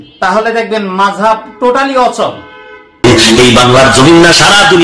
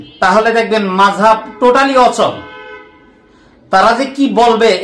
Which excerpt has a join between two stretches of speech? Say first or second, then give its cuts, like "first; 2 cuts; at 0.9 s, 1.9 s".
first; 1 cut; at 3.0 s